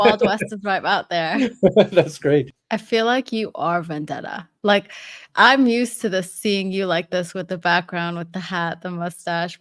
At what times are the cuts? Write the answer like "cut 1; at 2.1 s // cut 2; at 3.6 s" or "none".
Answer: cut 1; at 2.5 s